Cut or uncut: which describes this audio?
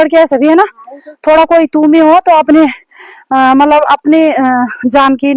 uncut